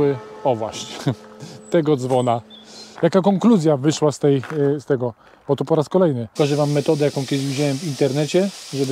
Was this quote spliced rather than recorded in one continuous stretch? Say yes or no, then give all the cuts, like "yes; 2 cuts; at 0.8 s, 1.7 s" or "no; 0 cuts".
yes; 2 cuts; at 2.8 s, 6.2 s